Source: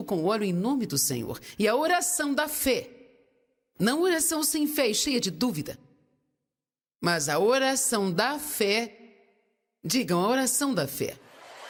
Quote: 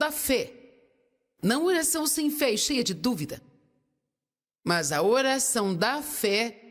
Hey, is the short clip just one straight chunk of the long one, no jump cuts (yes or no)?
yes